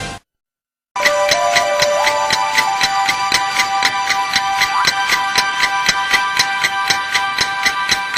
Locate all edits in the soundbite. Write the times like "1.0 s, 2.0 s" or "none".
7.1 s